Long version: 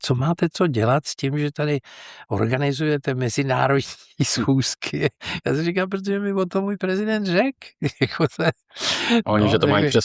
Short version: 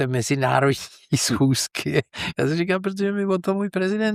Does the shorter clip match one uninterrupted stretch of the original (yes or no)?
yes